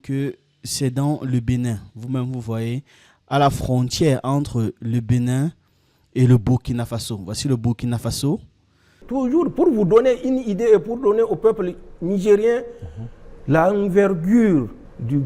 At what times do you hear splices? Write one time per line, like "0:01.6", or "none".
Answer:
0:09.0